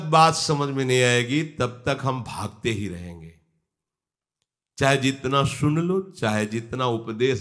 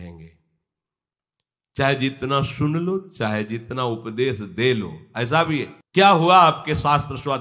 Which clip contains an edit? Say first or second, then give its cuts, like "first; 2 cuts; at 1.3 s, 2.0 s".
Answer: second; 1 cut; at 5.8 s